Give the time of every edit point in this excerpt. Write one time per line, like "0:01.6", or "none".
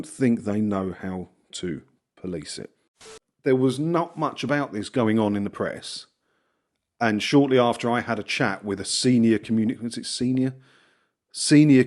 0:03.1